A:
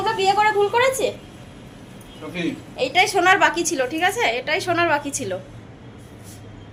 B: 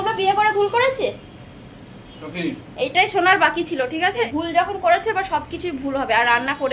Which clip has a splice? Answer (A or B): B